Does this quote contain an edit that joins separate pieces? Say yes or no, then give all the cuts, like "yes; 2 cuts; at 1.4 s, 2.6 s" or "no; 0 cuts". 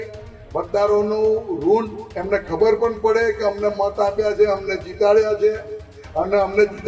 no; 0 cuts